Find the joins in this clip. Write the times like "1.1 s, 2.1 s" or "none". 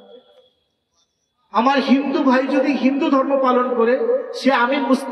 none